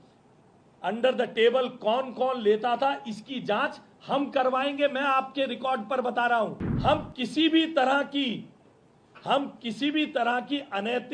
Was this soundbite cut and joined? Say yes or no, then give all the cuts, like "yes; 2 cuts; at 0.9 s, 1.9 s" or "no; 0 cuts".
yes; 1 cut; at 6.7 s